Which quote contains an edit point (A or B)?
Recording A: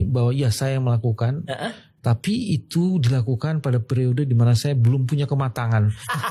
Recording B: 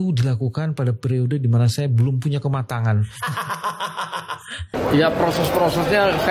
B